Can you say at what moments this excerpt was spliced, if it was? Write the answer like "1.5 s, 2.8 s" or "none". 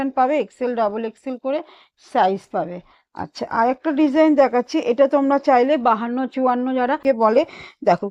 7.0 s